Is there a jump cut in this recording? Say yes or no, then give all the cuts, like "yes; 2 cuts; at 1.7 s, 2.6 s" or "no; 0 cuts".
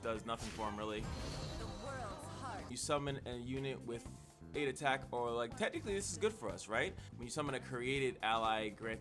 yes; 2 cuts; at 2.7 s, 7.1 s